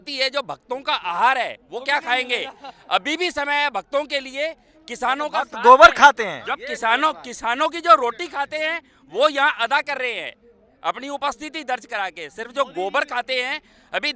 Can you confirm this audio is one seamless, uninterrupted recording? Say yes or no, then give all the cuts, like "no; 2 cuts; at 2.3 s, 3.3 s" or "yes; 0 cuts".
yes; 0 cuts